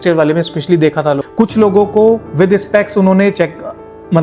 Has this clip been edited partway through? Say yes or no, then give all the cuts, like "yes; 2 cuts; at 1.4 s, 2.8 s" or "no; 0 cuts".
yes; 1 cut; at 1.2 s